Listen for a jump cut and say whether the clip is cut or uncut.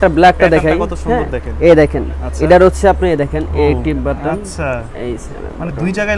uncut